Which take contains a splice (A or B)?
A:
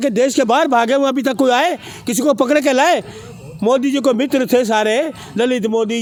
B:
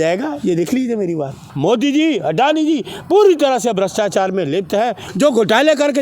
B